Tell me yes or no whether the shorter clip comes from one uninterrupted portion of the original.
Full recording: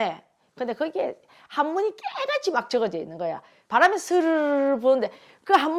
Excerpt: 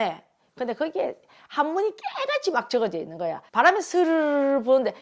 no